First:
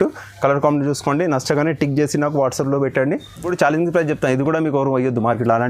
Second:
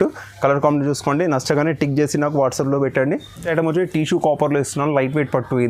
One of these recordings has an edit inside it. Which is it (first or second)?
first